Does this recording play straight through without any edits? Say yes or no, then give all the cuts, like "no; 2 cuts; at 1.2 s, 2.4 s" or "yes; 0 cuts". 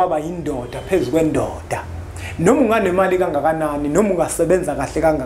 yes; 0 cuts